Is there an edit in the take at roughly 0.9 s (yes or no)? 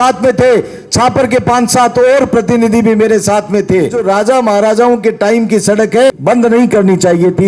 no